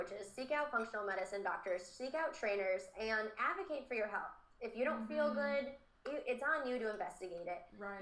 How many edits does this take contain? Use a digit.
0